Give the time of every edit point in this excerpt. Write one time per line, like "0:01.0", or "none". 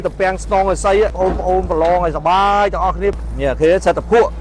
0:01.1
0:03.2